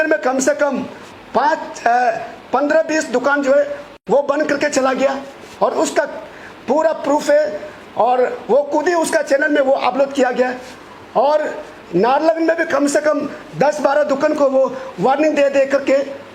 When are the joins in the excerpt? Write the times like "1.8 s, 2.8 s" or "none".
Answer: none